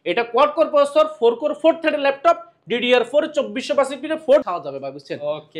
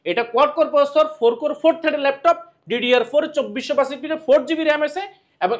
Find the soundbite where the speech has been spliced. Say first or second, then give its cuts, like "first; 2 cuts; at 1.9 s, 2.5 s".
first; 1 cut; at 4.4 s